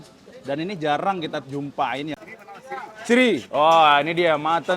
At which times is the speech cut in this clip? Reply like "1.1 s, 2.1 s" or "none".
2.2 s

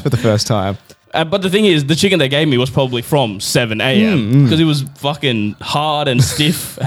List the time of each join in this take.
0.9 s

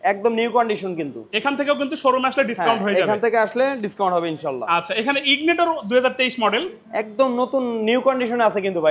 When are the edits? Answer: none

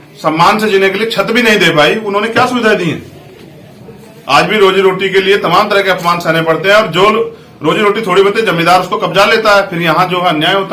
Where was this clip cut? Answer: none

